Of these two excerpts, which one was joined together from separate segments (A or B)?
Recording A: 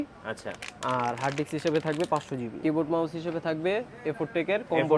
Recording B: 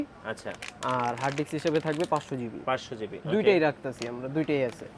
A